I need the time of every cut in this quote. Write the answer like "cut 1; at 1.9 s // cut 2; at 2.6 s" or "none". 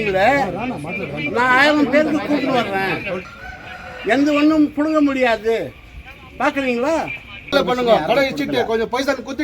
cut 1; at 3.2 s // cut 2; at 7.5 s

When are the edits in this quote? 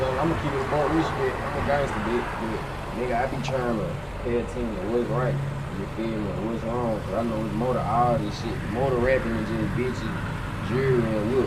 none

